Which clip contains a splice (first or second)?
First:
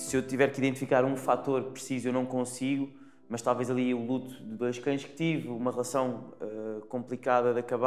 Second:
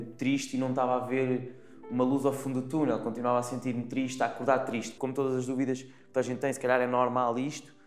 second